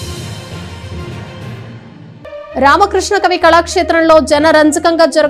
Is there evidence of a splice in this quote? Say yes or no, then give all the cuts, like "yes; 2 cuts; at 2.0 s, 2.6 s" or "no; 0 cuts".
yes; 1 cut; at 2.2 s